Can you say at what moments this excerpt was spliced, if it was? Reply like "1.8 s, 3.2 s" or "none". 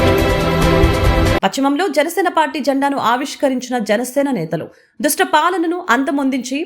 1.4 s